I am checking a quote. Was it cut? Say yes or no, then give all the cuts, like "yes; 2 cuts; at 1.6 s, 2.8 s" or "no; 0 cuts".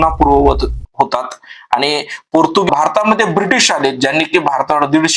yes; 1 cut; at 2.7 s